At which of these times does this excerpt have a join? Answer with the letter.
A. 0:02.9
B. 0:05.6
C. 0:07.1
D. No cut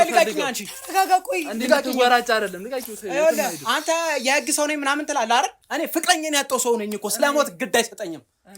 B